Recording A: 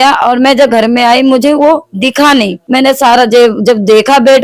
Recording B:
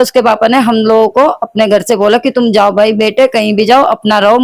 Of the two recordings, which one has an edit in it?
A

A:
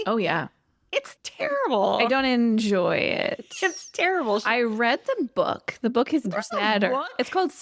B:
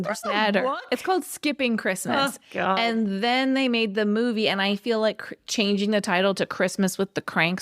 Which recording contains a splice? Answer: A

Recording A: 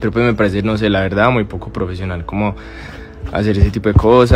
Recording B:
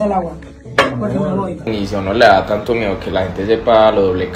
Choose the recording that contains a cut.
B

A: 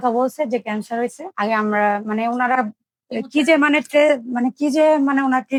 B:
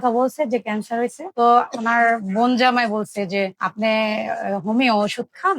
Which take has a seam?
B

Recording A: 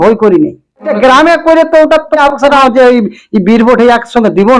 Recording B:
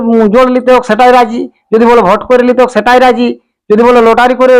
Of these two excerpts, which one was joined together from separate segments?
A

